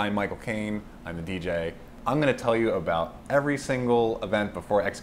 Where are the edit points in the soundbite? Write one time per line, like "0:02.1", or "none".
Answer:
0:01.9